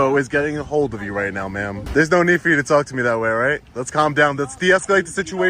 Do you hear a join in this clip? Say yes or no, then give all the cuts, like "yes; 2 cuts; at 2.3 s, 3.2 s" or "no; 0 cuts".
yes; 1 cut; at 1.8 s